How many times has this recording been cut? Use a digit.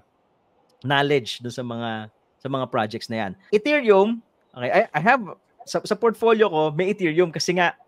1